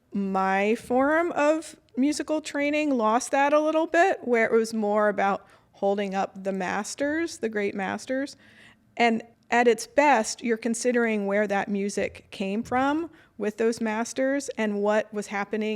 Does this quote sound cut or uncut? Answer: cut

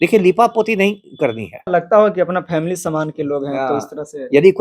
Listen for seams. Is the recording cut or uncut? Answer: cut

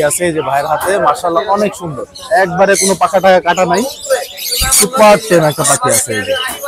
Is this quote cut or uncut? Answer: uncut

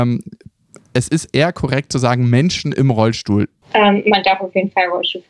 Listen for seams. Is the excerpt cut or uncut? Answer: cut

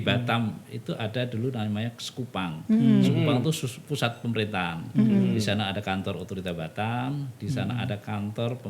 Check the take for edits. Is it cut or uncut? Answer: uncut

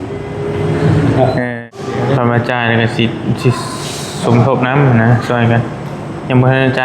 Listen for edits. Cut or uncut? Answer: cut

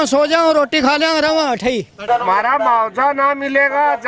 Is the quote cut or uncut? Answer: cut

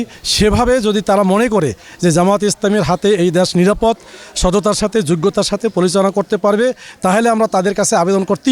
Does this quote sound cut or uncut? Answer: uncut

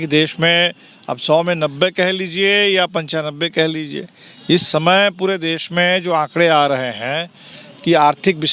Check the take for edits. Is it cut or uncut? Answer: uncut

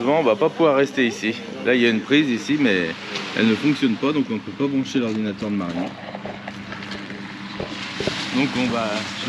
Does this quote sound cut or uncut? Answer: uncut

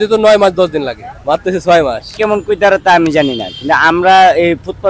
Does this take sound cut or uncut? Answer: cut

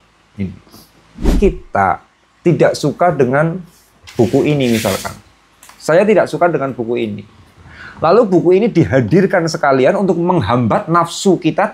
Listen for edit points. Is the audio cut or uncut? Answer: cut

